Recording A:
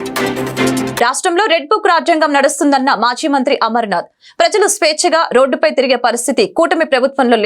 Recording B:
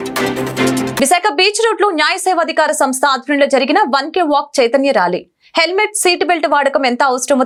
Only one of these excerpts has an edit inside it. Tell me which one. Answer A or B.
A